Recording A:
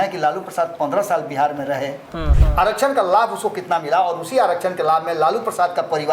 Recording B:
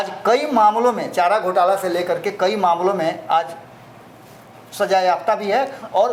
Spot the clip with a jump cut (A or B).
A